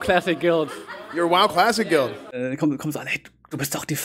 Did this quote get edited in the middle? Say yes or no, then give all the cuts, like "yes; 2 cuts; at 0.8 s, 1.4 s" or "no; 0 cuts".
yes; 1 cut; at 2.4 s